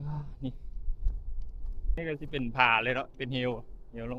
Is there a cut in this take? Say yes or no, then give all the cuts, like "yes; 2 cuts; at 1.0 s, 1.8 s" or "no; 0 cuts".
yes; 1 cut; at 2.0 s